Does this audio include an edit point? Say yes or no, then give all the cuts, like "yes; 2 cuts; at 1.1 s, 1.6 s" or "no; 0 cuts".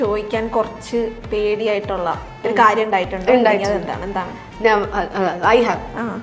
no; 0 cuts